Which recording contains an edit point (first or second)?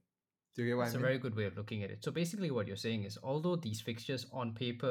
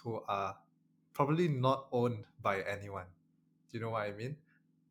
first